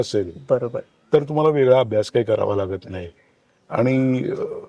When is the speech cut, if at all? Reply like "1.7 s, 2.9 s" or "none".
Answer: none